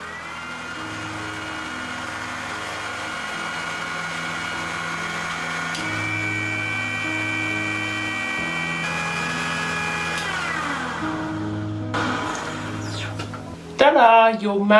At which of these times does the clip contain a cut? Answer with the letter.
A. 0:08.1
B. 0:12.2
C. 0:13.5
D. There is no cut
C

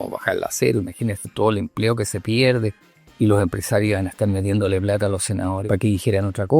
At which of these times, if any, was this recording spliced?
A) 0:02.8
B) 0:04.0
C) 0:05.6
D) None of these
C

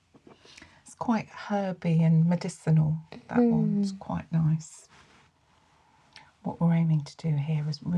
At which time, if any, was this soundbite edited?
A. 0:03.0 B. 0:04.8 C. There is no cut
B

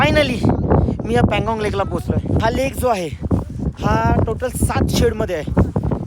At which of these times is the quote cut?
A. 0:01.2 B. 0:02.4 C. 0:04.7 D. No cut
B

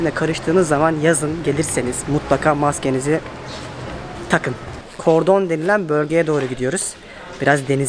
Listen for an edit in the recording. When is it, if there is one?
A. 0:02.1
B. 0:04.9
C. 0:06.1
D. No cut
B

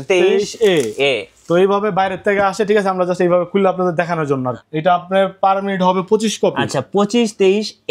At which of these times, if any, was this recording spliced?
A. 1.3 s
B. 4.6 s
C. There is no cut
B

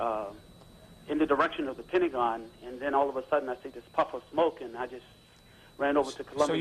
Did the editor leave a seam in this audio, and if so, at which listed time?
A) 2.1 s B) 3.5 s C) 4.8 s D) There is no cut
D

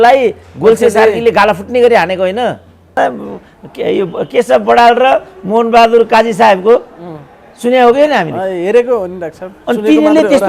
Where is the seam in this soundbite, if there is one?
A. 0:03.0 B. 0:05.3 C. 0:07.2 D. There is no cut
A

